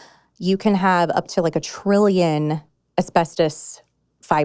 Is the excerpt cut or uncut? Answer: uncut